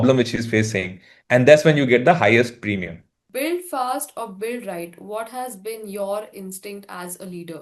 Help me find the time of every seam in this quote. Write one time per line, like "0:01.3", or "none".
0:03.2